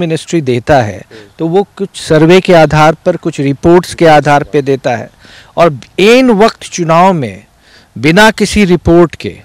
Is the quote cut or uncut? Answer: uncut